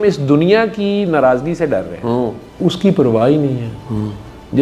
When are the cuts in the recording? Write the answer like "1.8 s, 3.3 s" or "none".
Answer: 2.4 s